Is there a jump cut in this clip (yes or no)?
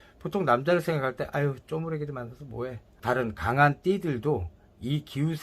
yes